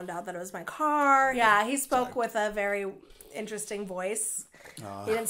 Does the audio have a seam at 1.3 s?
yes; 1 cut; at 1.3 s

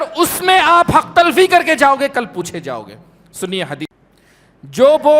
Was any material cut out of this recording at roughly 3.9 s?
yes; 1 cut; at 3.9 s

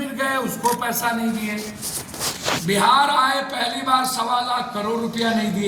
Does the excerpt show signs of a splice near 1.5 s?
no; 0 cuts

